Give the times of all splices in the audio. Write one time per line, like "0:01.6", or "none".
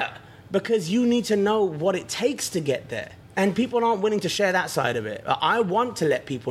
0:03.1